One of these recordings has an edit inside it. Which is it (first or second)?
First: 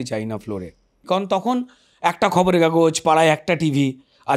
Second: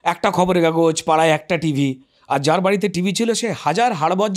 first